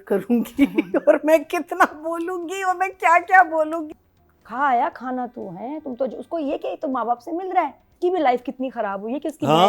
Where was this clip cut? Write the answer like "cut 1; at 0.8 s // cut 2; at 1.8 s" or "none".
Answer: cut 1; at 3.9 s // cut 2; at 7.9 s